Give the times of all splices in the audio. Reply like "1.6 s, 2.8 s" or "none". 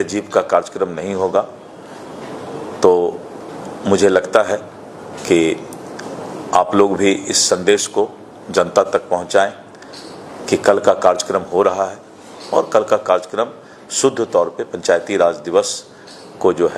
none

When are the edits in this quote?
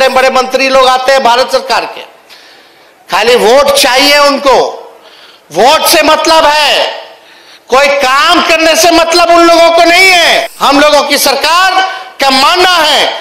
10.5 s

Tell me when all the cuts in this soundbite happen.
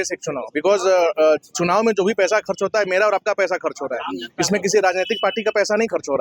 none

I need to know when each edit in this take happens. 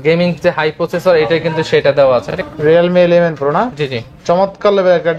2.4 s

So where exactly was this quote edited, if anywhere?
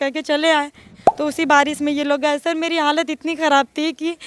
1.0 s

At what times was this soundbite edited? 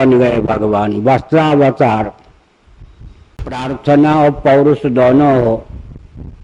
3.4 s

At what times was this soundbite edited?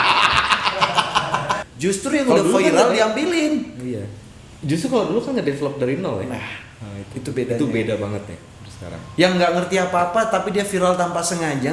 1.7 s

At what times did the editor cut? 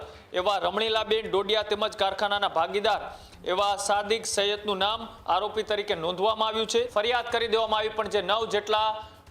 6.9 s

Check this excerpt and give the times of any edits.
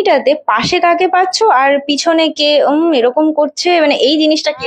none

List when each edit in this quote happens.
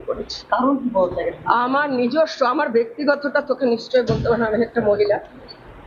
none

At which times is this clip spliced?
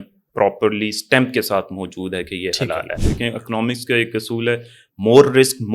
3.0 s

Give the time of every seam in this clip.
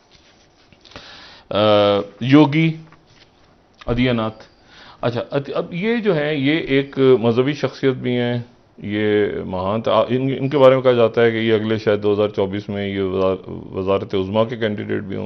none

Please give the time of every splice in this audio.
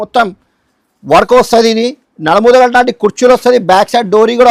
none

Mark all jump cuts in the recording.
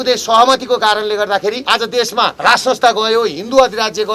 1.6 s, 2.4 s

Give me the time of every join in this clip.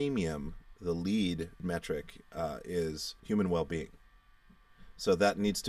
1.6 s, 3.1 s

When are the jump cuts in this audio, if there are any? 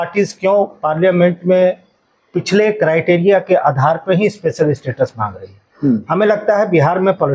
none

